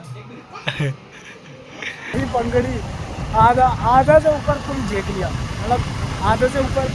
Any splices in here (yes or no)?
yes